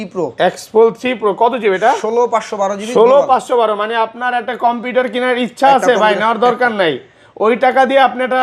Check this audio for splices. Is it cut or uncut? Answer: uncut